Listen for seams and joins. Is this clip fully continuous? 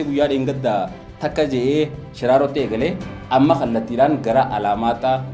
yes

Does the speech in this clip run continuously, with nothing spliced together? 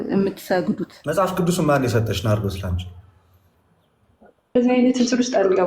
no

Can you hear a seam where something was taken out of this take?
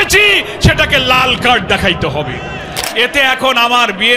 yes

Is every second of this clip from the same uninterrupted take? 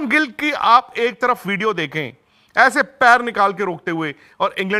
yes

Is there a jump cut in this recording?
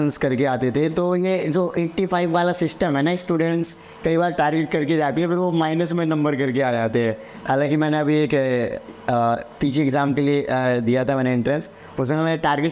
no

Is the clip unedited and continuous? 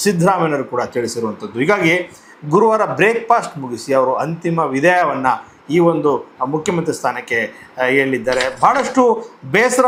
yes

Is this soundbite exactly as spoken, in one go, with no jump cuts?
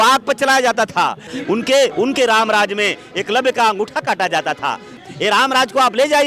no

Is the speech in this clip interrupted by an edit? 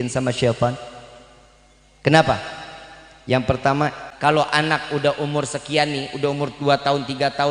yes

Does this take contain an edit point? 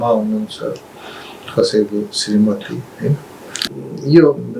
yes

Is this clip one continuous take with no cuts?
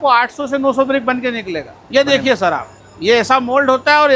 no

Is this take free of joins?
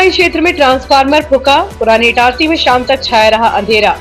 yes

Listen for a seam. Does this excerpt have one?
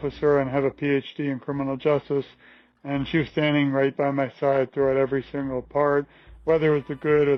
no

